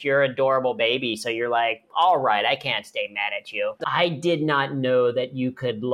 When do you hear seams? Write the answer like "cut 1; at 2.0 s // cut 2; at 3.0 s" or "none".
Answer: cut 1; at 3.8 s